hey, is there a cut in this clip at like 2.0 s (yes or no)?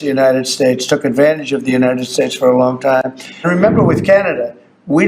no